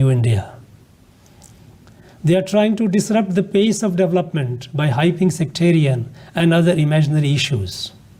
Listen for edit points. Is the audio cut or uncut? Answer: uncut